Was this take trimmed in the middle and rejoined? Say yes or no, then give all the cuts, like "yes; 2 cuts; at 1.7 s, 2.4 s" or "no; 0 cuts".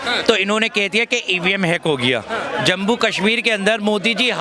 yes; 1 cut; at 2.5 s